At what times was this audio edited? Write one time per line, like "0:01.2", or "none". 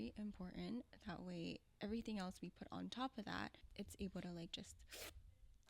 0:03.6